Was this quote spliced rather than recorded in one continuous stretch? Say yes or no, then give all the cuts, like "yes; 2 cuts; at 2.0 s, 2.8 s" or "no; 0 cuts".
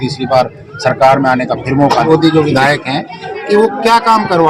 yes; 1 cut; at 2.1 s